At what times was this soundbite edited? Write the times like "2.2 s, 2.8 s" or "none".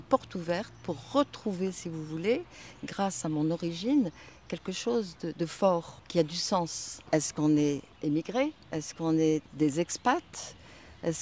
6.0 s, 6.9 s, 7.9 s, 8.6 s, 9.5 s